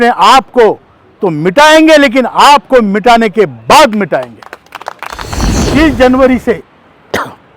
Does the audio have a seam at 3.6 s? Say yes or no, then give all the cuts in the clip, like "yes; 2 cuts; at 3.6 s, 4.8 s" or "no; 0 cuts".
no; 1 cut; at 5.7 s